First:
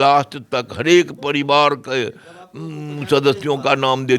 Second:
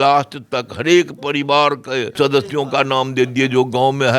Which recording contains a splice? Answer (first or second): second